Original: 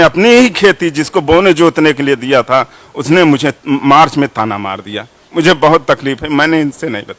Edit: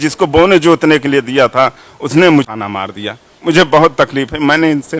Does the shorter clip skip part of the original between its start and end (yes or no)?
yes